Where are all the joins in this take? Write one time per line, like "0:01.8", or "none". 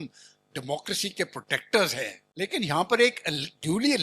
0:02.2